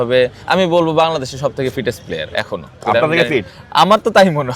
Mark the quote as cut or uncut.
cut